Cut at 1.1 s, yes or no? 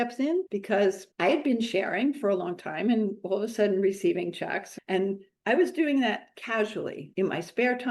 no